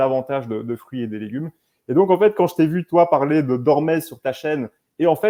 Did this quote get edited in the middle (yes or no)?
no